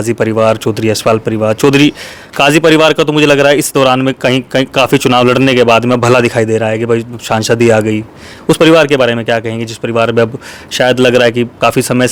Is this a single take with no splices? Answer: yes; 0 cuts

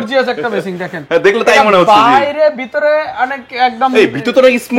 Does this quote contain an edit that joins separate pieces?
no; 0 cuts

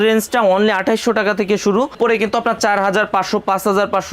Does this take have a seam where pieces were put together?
yes; 1 cut; at 2.0 s

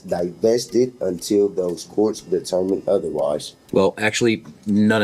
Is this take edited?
yes; 1 cut; at 3.6 s

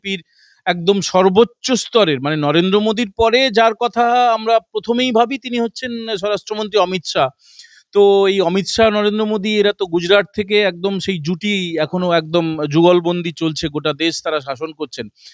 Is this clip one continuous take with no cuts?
yes; 0 cuts

